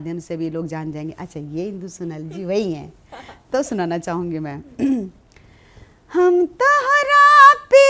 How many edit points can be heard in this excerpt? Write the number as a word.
zero